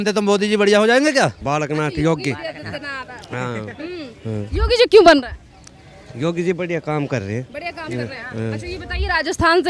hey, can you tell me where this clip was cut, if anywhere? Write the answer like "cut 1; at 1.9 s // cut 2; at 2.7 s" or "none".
cut 1; at 1.4 s